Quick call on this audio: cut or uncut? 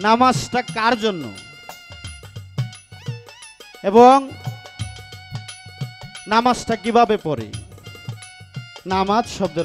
uncut